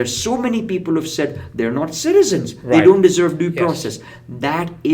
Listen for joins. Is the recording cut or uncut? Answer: uncut